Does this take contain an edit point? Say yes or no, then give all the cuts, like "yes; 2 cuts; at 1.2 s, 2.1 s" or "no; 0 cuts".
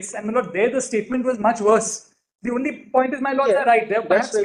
no; 0 cuts